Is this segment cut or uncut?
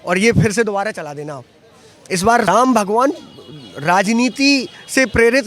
cut